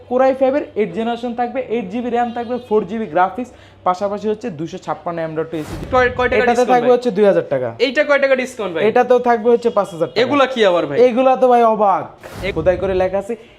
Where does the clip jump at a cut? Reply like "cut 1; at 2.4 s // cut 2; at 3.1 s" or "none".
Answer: cut 1; at 5.8 s // cut 2; at 12.5 s